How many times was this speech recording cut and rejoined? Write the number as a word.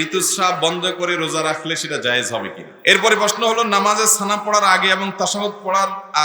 one